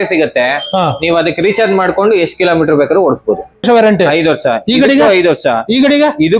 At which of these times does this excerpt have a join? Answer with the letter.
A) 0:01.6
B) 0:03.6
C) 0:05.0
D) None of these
B